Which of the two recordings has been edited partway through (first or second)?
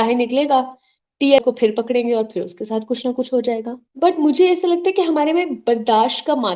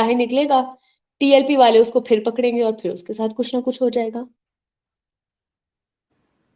first